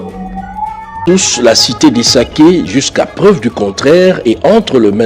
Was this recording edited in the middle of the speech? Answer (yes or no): yes